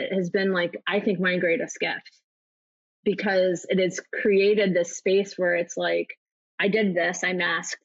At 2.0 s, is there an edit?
no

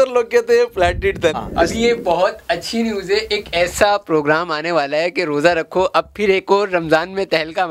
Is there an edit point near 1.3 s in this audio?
yes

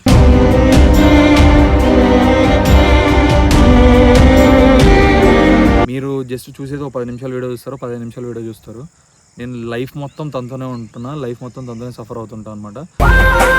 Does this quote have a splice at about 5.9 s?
yes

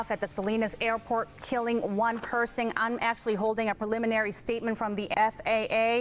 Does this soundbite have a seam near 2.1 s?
no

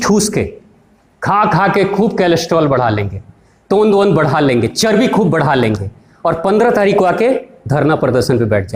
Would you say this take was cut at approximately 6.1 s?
no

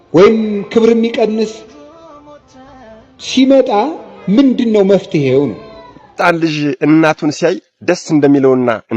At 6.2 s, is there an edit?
yes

